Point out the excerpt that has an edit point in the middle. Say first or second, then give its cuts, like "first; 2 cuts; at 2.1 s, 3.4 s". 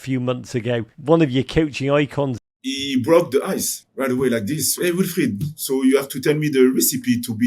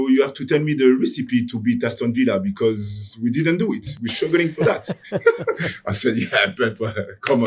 first; 4 cuts; at 0.9 s, 2.4 s, 3.8 s, 4.7 s